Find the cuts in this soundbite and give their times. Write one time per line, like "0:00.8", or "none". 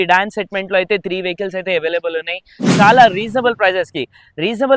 0:02.6

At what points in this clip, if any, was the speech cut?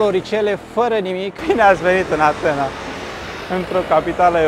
0:01.3

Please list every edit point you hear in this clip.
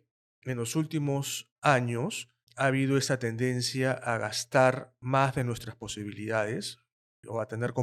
none

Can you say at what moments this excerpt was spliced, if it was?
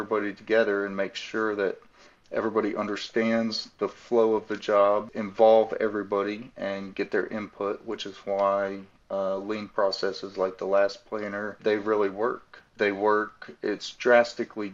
0:05.2
0:11.6
0:12.7

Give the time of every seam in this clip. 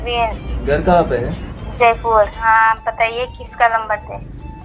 0:02.4

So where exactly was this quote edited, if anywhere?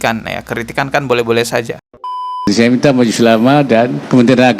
0:02.1

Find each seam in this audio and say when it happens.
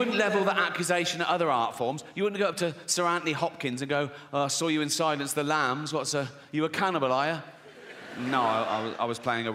none

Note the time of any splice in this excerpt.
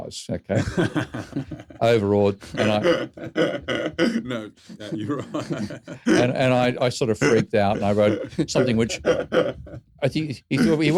none

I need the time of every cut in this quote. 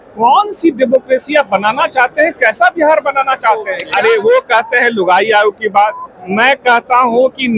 0:03.8

